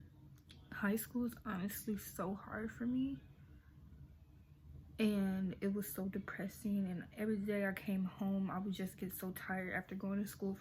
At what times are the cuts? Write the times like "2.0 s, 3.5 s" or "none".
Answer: none